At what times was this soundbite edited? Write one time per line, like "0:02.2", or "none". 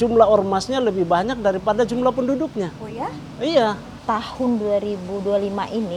0:03.9